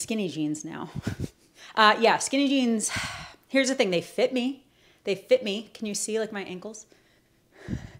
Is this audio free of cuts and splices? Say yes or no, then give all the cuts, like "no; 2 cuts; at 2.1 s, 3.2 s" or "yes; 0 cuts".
yes; 0 cuts